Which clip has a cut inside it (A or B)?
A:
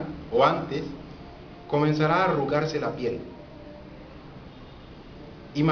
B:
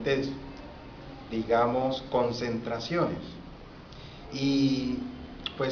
B